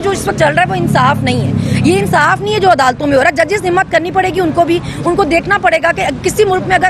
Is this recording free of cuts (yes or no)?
yes